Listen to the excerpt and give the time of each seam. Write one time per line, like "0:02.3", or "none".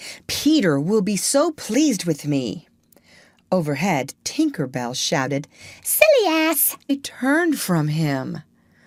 none